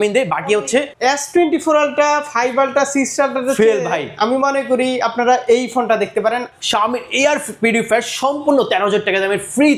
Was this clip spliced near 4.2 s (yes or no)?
no